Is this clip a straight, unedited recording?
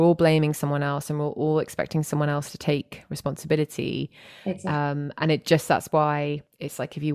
yes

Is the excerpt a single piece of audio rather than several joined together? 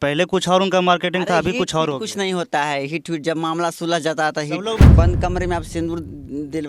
no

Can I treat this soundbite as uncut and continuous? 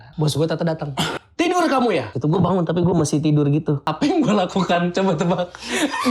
no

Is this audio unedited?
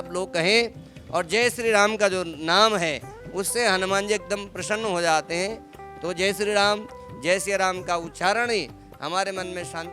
yes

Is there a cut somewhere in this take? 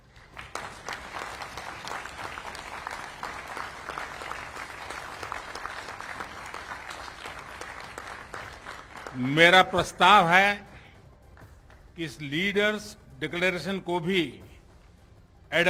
no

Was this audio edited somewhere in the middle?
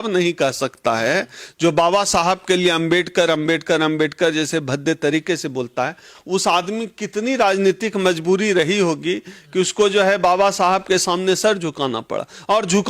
no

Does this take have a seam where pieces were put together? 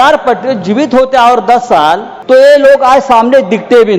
yes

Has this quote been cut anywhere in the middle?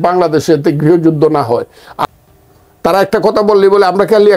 yes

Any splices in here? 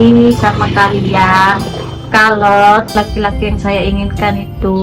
yes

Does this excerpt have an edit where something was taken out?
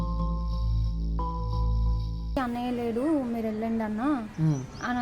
yes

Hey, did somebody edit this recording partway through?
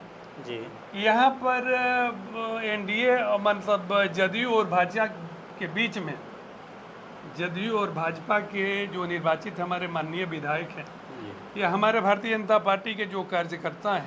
no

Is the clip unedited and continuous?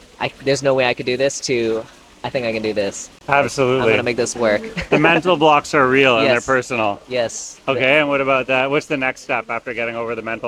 yes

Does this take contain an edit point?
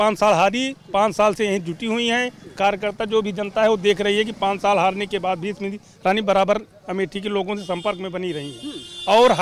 no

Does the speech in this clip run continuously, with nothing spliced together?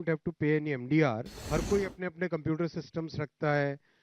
no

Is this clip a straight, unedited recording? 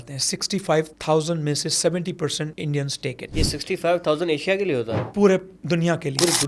no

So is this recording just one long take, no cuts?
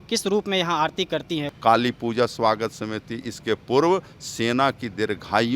no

